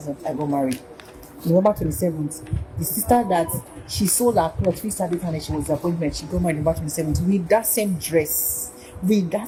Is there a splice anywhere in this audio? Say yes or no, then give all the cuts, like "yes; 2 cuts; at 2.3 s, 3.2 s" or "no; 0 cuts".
no; 0 cuts